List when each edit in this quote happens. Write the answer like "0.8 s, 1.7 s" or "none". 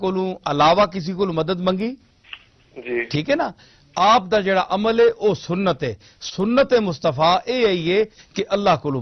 none